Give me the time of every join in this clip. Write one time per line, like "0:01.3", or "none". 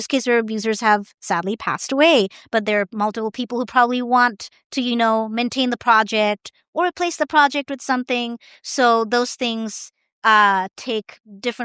none